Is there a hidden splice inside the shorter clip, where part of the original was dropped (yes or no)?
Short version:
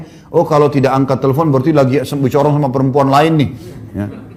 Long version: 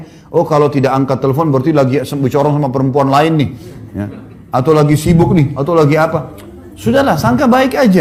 no